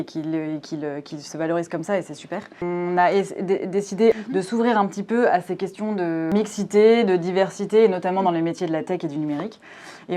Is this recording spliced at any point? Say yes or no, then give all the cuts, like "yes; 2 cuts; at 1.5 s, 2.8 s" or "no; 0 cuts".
yes; 3 cuts; at 2.6 s, 4.2 s, 6.3 s